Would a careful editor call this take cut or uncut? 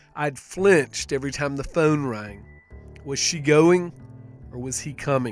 uncut